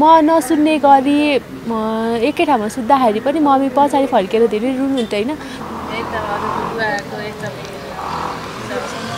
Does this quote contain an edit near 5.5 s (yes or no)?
yes